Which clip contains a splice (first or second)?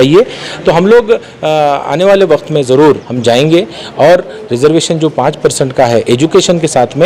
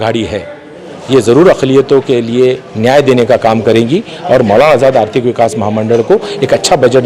first